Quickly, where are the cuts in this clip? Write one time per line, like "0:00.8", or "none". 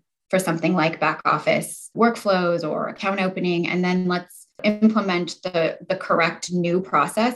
0:01.9
0:04.6